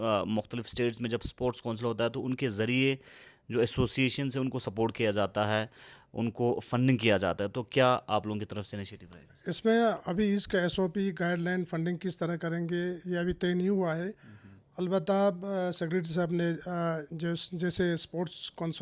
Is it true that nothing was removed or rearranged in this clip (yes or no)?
yes